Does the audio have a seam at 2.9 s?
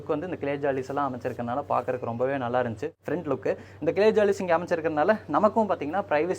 yes; 1 cut; at 2.9 s

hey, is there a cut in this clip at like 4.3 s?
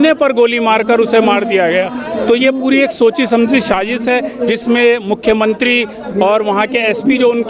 no; 0 cuts

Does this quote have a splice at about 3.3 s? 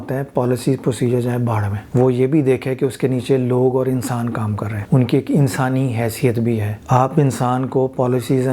no; 3 cuts; at 1.8 s, 4.7 s, 6.7 s

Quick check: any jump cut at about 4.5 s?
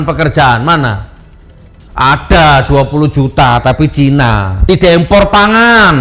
yes; 1 cut; at 4.5 s

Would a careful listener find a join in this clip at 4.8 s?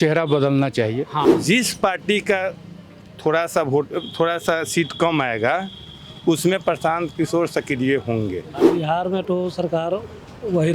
no; 2 cuts; at 1.3 s, 8.5 s

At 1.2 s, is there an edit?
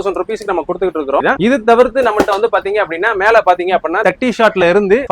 yes; 1 cut; at 1.2 s

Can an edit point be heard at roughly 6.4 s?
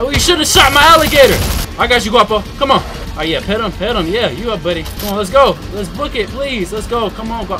no; 3 cuts; at 1.6 s, 3.0 s, 4.9 s

